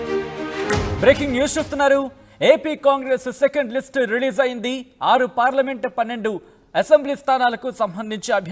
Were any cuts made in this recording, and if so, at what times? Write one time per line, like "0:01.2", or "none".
0:00.9